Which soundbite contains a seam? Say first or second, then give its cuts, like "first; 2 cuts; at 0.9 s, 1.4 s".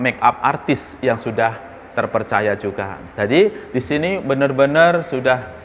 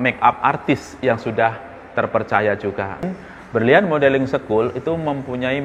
second; 1 cut; at 3.1 s